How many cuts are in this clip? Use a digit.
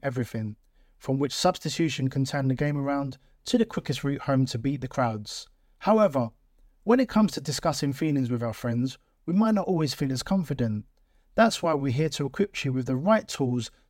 0